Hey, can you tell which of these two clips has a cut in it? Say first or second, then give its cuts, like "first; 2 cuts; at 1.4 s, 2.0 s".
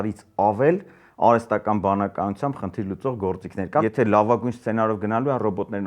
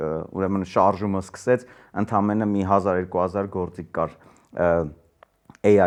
first; 1 cut; at 3.8 s